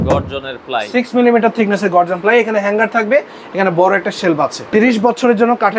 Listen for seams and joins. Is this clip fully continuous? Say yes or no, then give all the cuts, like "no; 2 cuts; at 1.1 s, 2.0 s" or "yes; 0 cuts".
no; 1 cut; at 4.7 s